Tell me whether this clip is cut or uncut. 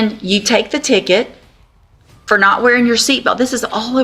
uncut